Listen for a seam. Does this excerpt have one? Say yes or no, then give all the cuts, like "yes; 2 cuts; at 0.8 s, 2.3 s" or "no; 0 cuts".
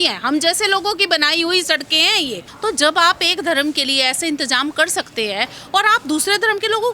yes; 1 cut; at 2.5 s